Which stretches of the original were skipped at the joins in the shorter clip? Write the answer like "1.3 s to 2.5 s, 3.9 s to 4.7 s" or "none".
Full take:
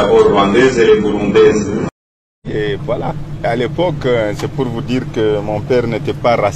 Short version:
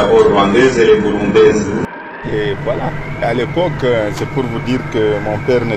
2.1 s to 2.3 s